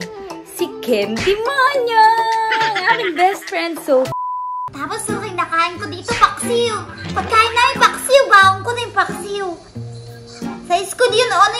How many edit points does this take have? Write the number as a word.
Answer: one